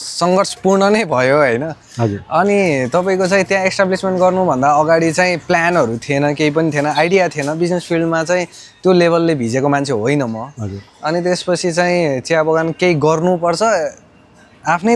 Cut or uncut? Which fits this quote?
uncut